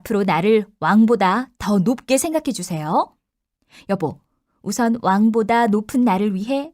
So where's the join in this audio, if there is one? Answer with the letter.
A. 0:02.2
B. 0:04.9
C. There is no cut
A